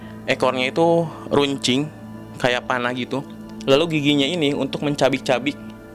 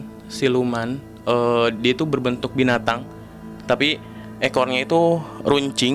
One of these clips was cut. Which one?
first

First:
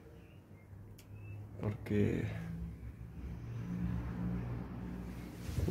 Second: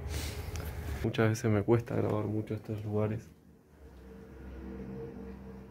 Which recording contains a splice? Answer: second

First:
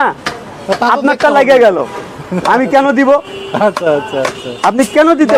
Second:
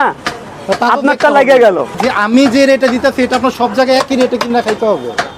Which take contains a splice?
second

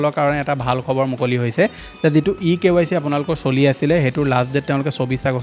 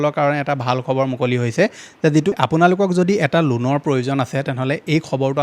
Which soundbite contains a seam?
second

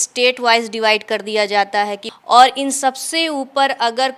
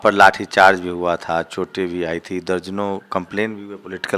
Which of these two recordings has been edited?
first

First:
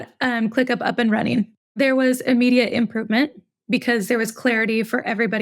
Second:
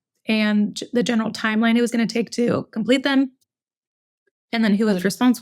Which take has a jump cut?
first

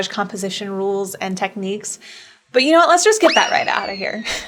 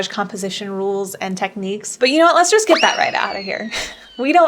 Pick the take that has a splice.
second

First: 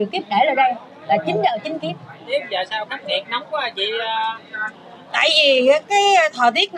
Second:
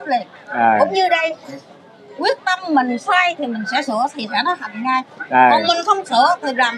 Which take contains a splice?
first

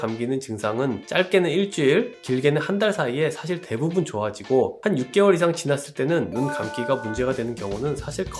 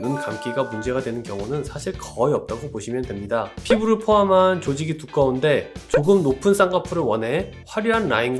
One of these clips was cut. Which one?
second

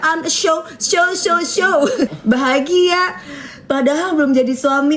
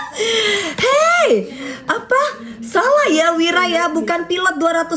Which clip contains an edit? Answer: first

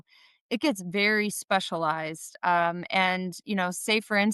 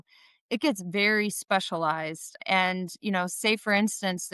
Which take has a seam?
second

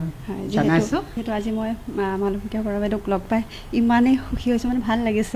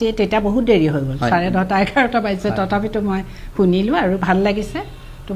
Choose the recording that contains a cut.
first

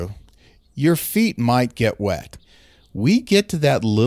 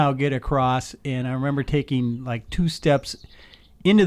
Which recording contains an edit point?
first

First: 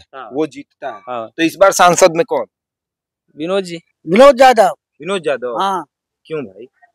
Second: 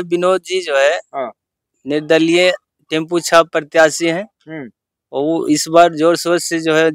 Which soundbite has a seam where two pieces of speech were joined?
first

